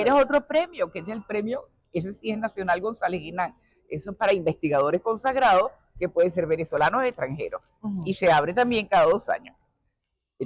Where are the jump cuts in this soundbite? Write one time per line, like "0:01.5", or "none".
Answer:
none

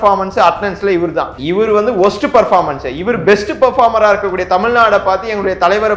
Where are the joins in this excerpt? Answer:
0:01.3

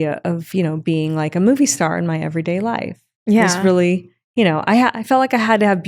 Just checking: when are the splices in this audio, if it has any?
none

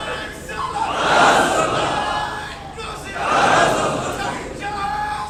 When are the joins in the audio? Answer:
none

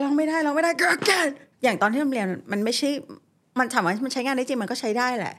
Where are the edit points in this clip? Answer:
0:01.5

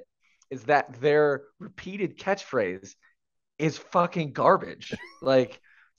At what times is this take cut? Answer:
none

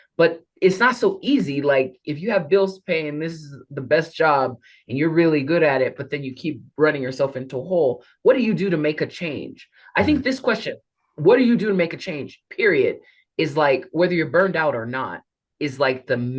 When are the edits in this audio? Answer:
none

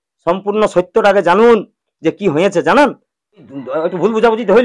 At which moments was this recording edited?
0:03.6

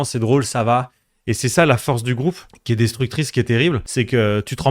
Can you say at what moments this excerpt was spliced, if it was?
0:02.5
0:03.8

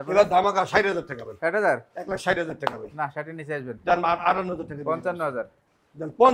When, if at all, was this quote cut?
none

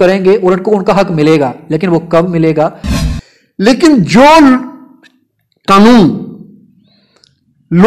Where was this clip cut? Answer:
0:02.8

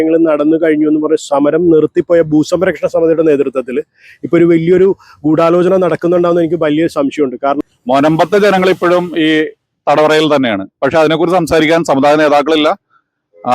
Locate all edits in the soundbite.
0:07.6

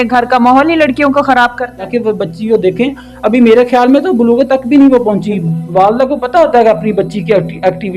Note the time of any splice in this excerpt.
0:01.9
0:05.4

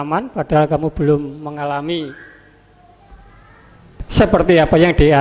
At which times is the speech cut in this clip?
0:04.1

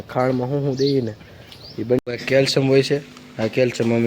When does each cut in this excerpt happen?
0:02.0

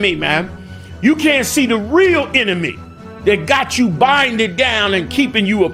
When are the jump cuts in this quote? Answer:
none

